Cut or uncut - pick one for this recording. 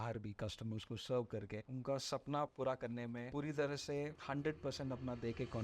cut